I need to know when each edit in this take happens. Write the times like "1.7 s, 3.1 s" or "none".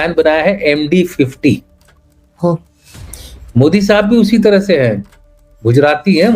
none